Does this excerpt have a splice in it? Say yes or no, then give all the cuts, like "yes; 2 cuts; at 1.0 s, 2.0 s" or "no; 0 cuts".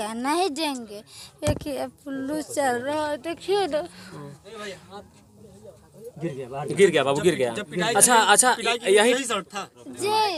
no; 0 cuts